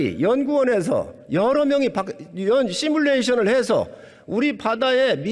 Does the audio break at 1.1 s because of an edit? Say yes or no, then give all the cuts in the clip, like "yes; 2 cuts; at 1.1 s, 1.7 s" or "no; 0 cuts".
no; 0 cuts